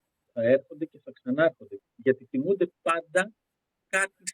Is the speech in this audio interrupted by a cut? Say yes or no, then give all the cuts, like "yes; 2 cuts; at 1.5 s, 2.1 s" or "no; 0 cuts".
yes; 1 cut; at 1.8 s